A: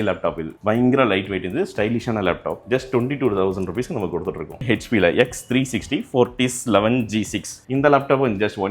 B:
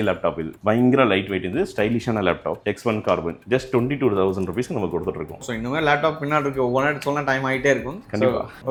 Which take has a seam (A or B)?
A